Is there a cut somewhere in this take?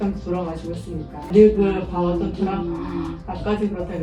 yes; 1 cut; at 1.3 s

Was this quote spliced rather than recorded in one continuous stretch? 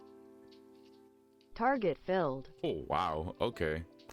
yes; 1 cut; at 1.5 s

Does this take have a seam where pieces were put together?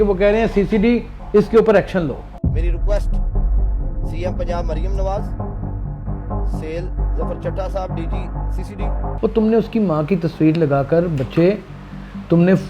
yes; 1 cut; at 9.1 s

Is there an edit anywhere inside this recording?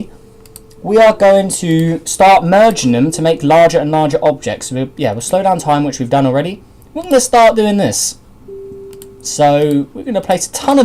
yes; 1 cut; at 5.9 s

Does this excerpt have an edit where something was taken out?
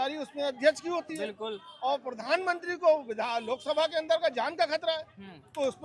no; 0 cuts

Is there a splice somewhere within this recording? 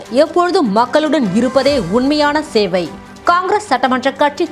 no; 0 cuts

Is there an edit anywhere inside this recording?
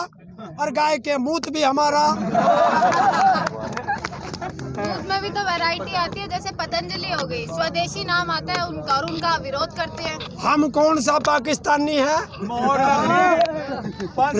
no; 0 cuts

